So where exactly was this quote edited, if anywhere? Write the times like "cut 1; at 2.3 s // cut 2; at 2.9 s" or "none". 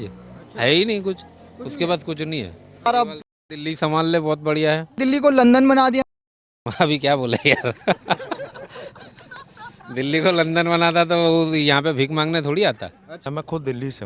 cut 1; at 2.9 s // cut 2; at 4.9 s // cut 3; at 13.2 s